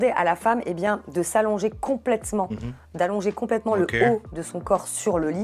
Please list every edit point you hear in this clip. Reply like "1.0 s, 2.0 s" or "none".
none